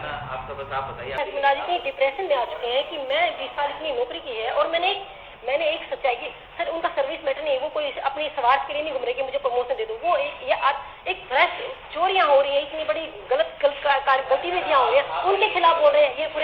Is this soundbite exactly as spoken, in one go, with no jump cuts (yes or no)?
no